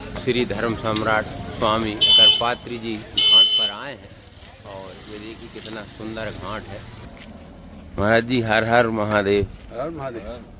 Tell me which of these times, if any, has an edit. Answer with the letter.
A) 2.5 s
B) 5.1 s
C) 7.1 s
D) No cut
C